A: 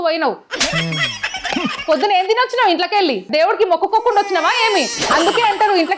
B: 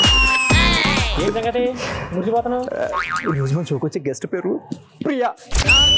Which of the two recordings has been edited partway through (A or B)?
B